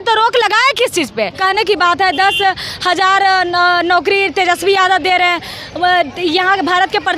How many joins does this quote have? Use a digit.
1